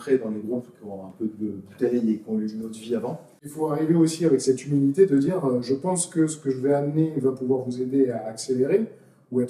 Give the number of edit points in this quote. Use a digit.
1